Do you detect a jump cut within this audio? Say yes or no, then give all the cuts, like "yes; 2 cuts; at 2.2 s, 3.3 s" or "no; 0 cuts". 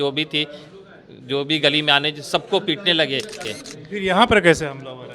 yes; 1 cut; at 3.4 s